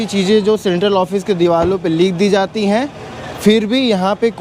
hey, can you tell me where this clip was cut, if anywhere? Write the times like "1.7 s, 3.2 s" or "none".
none

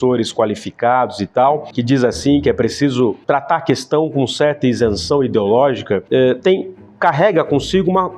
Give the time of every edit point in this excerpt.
none

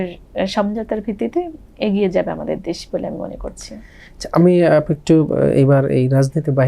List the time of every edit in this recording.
none

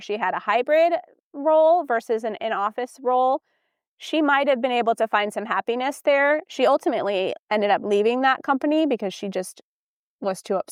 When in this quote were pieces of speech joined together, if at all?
none

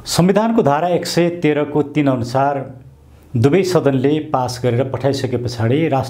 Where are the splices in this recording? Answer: none

